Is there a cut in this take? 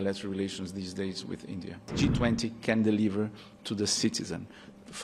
yes; 1 cut; at 1.9 s

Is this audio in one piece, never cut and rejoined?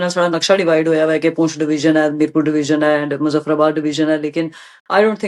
yes; 0 cuts

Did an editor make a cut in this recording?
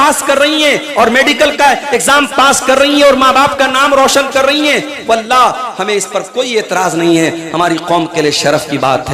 no; 0 cuts

